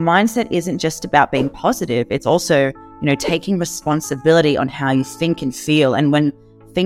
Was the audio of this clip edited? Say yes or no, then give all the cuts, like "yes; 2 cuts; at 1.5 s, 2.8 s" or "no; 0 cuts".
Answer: no; 0 cuts